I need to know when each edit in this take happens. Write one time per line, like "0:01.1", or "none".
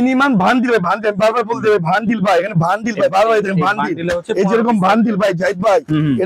none